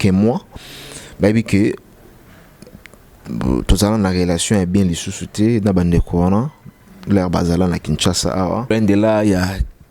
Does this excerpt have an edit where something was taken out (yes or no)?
yes